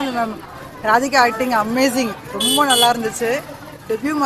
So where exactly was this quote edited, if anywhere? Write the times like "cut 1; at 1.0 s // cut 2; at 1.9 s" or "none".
none